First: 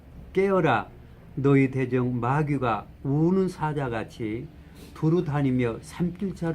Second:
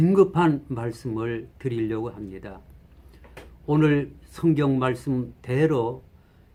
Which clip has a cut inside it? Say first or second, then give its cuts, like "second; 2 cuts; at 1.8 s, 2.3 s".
first; 1 cut; at 4.9 s